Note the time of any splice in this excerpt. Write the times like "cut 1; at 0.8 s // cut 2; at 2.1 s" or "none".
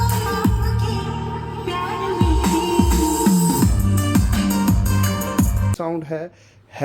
cut 1; at 5.7 s